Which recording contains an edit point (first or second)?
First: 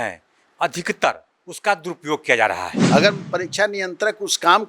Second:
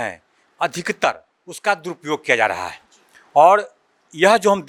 first